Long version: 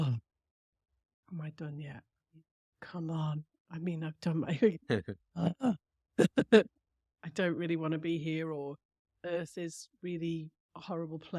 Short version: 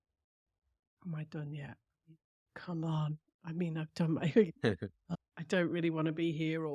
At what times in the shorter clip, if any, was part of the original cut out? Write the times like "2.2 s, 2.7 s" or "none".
5.0 s